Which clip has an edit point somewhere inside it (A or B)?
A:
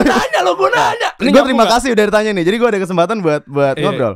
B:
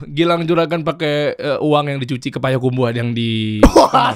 A